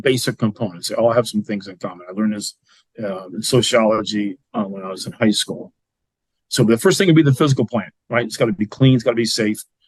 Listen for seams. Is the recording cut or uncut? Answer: uncut